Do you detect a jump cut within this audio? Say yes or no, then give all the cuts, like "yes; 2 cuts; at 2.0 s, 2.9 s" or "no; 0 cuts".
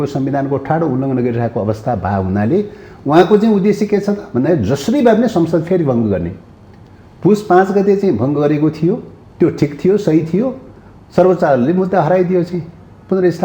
no; 0 cuts